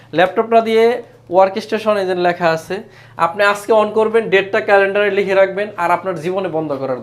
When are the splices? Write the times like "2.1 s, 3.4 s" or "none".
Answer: none